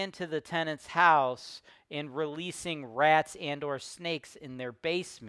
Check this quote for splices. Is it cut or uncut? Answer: uncut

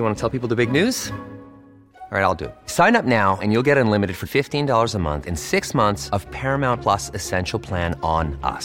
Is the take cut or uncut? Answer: uncut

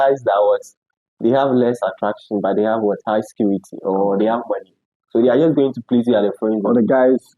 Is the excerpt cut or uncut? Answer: uncut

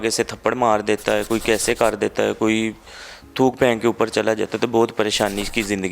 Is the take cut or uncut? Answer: uncut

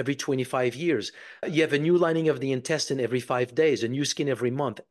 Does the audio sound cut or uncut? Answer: cut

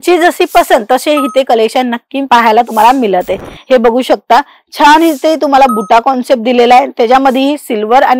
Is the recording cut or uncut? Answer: uncut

